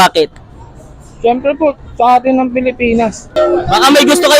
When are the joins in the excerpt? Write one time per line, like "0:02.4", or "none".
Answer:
0:03.3